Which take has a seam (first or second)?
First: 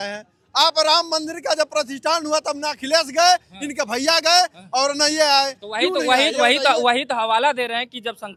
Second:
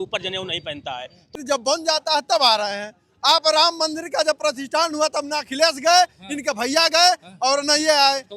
second